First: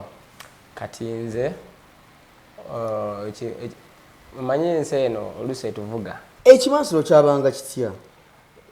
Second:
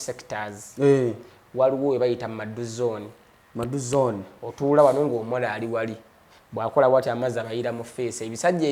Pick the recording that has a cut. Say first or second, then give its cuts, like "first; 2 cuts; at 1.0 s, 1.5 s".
first; 1 cut; at 6.2 s